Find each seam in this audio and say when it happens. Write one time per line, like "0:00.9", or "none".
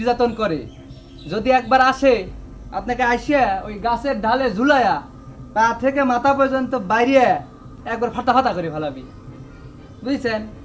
none